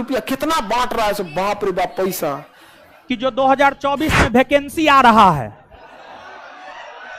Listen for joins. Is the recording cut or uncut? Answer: cut